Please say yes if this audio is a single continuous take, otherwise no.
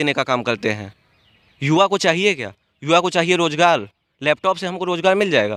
yes